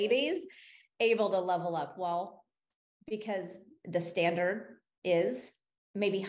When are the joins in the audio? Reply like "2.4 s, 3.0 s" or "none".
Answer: none